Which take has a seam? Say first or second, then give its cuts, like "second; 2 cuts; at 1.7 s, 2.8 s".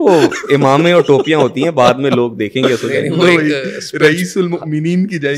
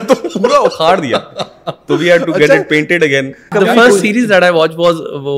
second; 1 cut; at 3.5 s